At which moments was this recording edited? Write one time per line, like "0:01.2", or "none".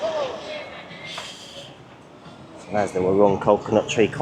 none